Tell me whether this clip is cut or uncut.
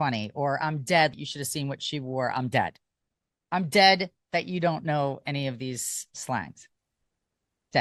cut